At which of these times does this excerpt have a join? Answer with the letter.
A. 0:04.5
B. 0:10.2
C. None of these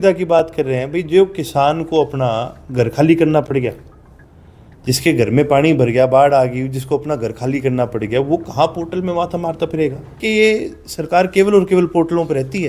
B